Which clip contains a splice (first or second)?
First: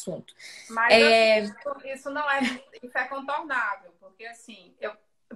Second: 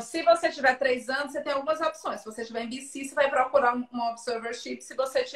first